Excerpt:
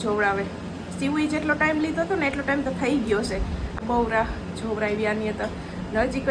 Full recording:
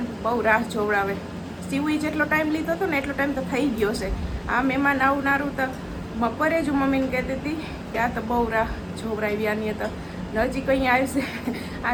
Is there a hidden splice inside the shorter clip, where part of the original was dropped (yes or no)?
yes